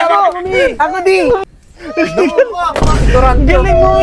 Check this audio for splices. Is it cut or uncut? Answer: cut